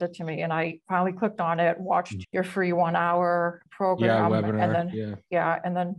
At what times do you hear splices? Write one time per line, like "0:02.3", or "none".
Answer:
0:02.2
0:03.6